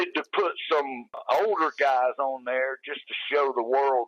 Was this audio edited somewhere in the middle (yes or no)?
yes